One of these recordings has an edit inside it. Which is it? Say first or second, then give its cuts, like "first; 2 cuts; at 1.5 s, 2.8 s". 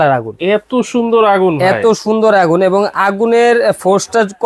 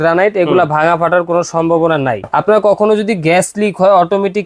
second; 1 cut; at 2.2 s